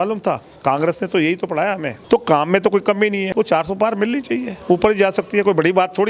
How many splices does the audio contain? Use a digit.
2